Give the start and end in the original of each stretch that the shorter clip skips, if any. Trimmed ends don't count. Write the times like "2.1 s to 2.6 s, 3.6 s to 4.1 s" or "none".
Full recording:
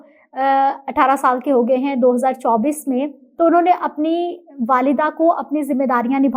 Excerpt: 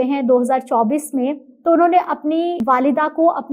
4.3 s to 4.6 s

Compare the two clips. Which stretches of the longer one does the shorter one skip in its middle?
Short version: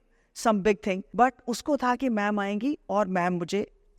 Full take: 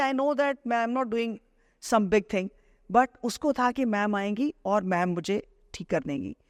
2.5 s to 2.8 s

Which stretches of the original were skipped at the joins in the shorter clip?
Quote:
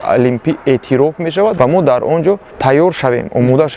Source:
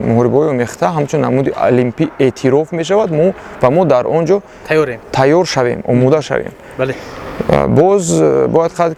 3.1 s to 3.6 s, 4.5 s to 5.0 s

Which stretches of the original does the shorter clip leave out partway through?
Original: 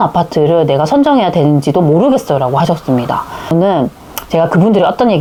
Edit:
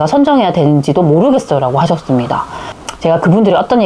3.4 s to 3.9 s

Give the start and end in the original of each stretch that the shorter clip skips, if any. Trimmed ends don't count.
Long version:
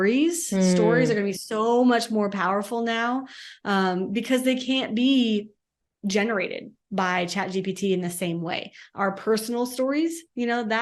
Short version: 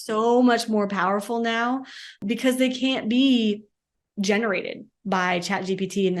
3.6 s to 4.1 s

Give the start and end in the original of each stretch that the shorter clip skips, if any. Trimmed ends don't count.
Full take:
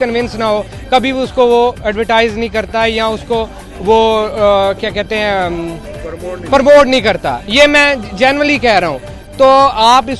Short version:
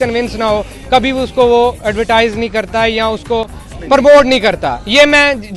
3.7 s to 6.3 s

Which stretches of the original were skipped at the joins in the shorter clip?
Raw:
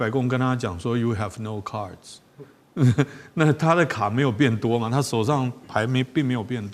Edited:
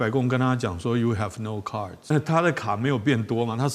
2.1 s to 3.4 s

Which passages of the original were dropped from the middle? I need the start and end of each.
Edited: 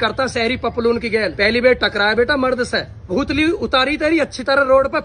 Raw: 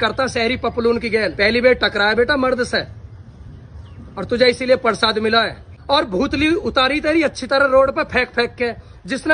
3.1 s to 6.1 s

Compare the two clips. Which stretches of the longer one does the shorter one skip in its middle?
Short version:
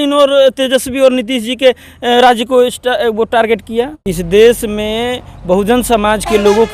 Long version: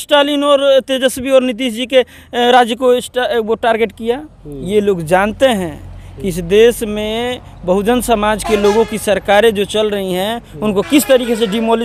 4.3 s to 6.2 s

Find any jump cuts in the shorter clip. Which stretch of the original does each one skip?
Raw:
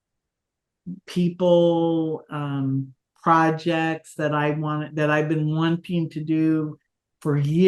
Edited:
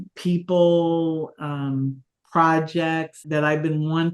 4.1 s to 4.8 s

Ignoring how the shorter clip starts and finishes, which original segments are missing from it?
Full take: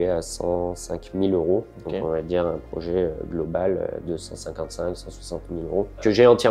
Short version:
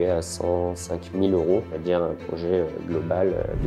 1.8 s to 2.2 s

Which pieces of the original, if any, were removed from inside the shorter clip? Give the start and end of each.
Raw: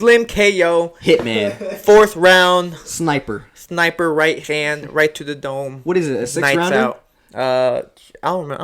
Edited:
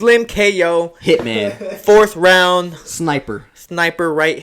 none

